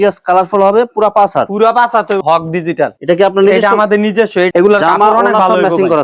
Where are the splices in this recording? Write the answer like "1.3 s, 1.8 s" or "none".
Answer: 2.2 s, 4.5 s